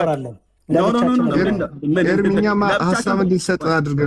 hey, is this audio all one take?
yes; 0 cuts

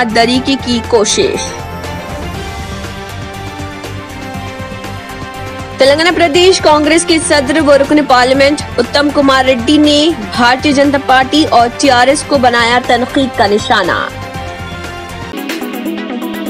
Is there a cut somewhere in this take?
yes; 1 cut; at 15.2 s

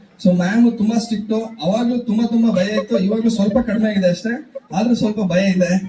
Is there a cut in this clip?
no; 0 cuts

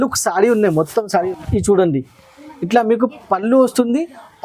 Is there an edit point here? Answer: yes; 1 cut; at 1.2 s

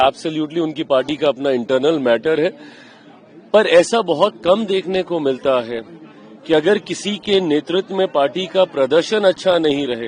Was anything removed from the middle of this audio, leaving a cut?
no; 0 cuts

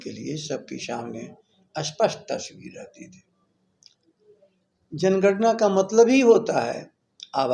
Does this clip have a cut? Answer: no; 0 cuts

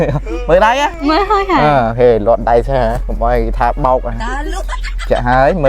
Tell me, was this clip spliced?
yes; 1 cut; at 0.9 s

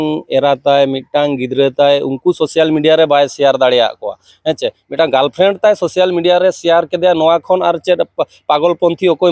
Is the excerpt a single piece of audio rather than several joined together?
yes; 0 cuts

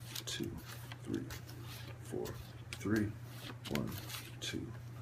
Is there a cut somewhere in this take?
yes; 1 cut; at 1.1 s

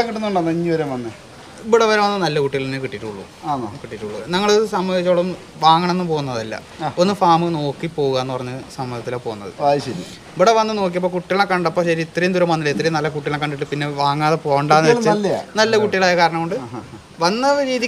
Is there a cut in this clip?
no; 0 cuts

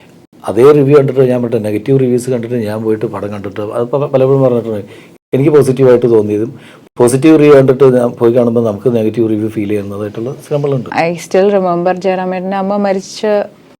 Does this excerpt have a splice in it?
yes; 1 cut; at 10.9 s

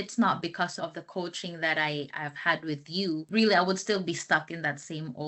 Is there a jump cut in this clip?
no; 0 cuts

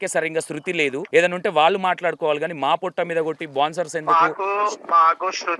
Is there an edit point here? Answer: yes; 1 cut; at 1.0 s

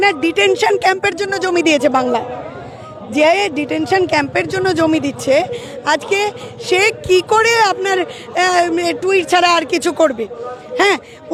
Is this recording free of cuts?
yes; 0 cuts

